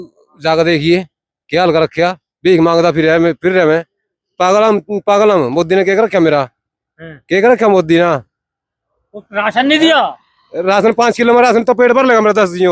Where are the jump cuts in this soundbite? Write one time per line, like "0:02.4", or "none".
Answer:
none